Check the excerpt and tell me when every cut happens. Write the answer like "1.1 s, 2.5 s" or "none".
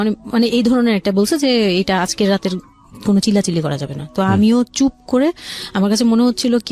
none